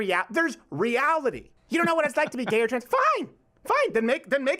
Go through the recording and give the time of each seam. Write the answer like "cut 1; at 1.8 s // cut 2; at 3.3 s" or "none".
cut 1; at 1.5 s